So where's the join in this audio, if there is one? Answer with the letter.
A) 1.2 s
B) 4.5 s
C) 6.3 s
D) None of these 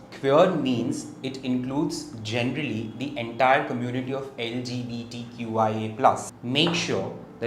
C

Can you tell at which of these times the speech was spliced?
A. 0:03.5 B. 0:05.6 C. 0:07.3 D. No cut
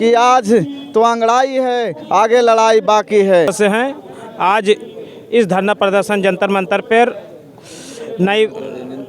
A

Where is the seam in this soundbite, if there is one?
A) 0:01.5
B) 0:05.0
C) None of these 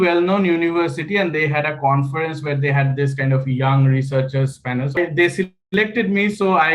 B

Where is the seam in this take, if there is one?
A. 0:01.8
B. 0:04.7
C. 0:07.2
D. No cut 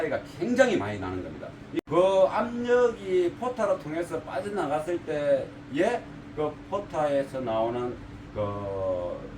A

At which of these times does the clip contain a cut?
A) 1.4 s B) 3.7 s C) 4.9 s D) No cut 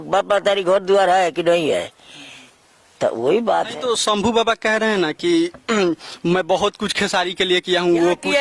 D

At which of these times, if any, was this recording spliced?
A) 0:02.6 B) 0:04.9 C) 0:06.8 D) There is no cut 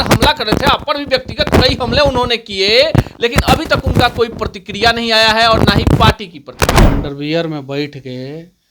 C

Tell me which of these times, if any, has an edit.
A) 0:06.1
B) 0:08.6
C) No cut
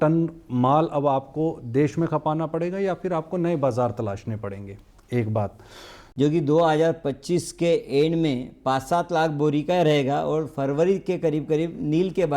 A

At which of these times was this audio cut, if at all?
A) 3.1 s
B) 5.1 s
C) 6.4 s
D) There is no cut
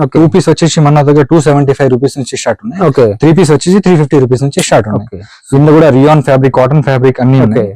D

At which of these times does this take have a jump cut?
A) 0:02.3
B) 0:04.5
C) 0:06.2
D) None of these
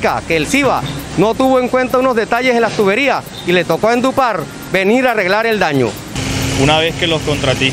C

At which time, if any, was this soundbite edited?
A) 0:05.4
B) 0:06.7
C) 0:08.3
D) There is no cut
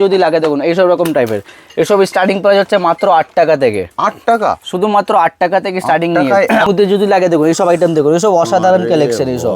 B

